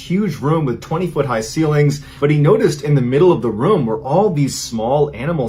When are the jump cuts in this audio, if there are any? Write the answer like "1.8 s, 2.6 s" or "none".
2.1 s